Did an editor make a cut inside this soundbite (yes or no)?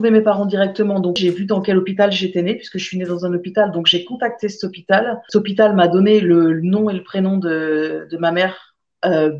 yes